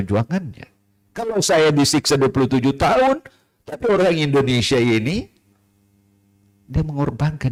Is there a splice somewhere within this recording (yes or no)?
no